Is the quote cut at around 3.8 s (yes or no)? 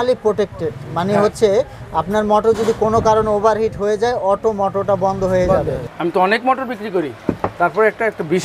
no